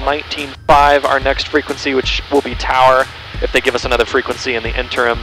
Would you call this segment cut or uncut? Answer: uncut